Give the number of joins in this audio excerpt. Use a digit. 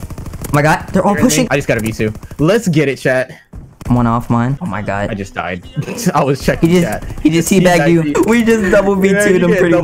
3